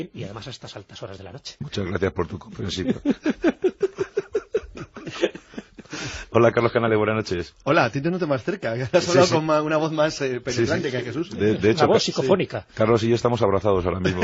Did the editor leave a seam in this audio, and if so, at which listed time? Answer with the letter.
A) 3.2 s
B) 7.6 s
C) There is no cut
C